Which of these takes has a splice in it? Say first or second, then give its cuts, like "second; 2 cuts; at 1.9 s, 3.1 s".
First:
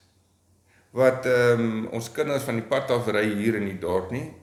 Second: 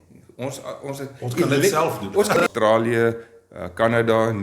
second; 1 cut; at 2.4 s